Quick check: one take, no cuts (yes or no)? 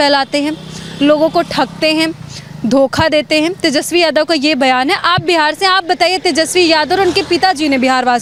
yes